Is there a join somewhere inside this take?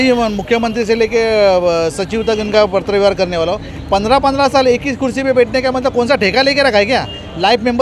no; 0 cuts

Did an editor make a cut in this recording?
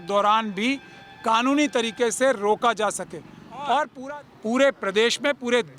yes; 1 cut; at 3.9 s

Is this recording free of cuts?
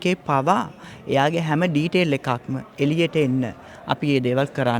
yes; 0 cuts

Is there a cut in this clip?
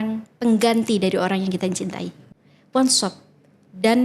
yes; 1 cut; at 2.2 s

